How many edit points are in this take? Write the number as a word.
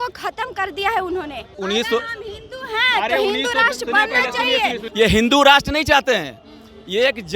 two